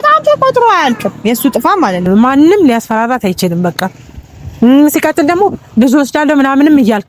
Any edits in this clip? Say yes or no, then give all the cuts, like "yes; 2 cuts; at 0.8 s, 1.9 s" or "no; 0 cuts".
yes; 1 cut; at 2.0 s